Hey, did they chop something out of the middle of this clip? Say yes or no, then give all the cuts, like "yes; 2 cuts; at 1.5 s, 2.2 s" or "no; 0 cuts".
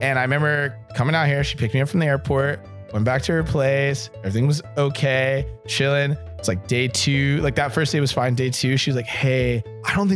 no; 0 cuts